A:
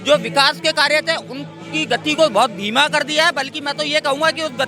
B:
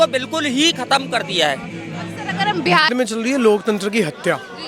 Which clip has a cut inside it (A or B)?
B